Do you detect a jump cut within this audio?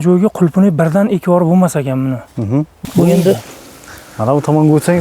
yes; 1 cut; at 2.7 s

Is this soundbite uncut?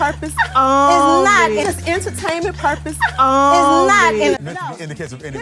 yes; 0 cuts

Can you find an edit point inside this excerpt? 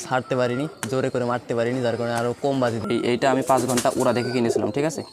yes; 1 cut; at 2.8 s

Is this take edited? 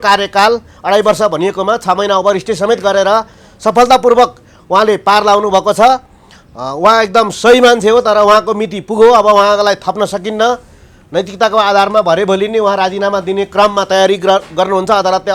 no; 0 cuts

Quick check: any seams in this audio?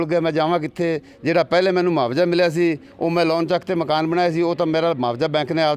no; 0 cuts

